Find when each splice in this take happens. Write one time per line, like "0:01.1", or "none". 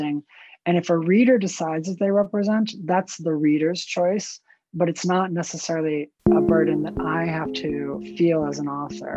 0:08.1